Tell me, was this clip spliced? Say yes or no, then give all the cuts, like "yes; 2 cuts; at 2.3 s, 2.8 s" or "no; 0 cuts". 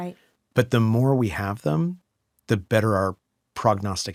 no; 0 cuts